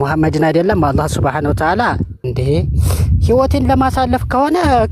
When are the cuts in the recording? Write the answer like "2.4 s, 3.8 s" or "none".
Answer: 2.2 s